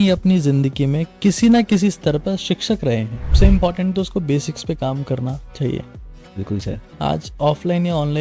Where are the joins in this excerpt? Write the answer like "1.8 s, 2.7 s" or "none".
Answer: 3.3 s